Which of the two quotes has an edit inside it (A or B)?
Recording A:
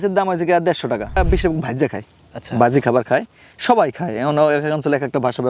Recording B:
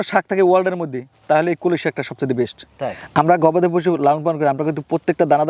A